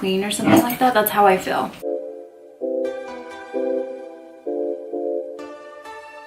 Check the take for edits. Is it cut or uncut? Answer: cut